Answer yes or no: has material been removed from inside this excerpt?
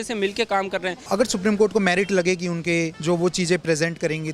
yes